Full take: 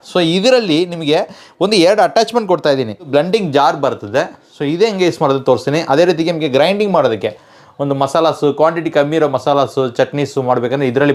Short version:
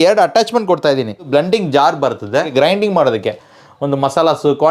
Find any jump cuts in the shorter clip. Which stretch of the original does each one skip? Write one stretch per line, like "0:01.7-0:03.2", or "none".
0:04.3-0:06.5